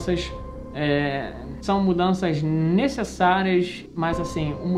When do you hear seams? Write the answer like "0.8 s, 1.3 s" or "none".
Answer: 1.6 s, 3.8 s